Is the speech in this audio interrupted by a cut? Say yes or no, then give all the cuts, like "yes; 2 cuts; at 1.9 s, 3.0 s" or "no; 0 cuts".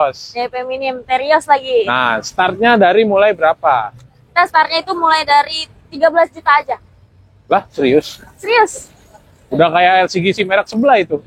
no; 0 cuts